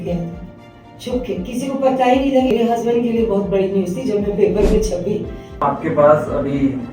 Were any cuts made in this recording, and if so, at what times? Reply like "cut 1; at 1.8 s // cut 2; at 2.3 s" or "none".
cut 1; at 2.5 s // cut 2; at 5.6 s